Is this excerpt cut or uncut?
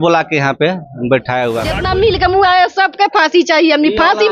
cut